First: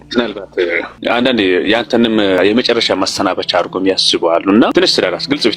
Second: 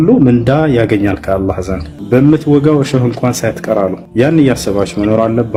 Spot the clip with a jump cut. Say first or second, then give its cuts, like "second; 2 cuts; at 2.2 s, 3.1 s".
first; 2 cuts; at 1.0 s, 2.4 s